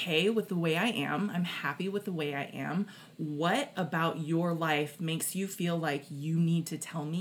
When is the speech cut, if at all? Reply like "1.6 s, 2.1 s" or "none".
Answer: none